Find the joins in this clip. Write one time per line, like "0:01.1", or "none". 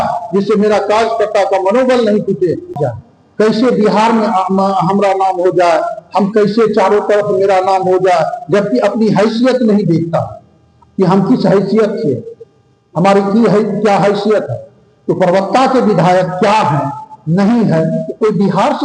0:02.7